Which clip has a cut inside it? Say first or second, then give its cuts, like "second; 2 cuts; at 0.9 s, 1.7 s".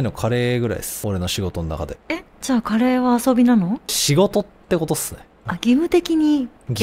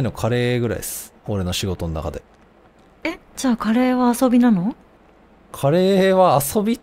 first; 3 cuts; at 0.9 s, 2.0 s, 4.0 s